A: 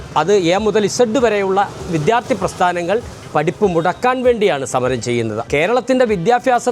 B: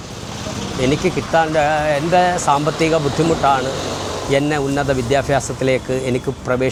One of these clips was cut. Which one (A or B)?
A